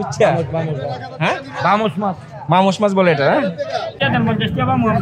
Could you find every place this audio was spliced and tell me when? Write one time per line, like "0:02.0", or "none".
0:04.0